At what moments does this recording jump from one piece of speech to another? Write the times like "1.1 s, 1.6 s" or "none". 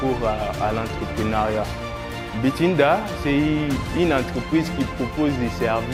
none